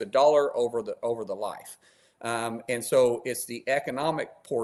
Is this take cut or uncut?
uncut